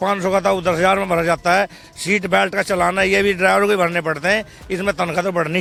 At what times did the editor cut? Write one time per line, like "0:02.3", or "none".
none